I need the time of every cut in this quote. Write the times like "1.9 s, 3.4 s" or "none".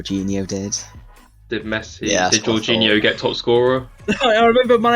3.9 s